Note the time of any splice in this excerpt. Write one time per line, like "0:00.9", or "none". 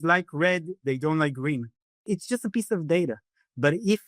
0:02.0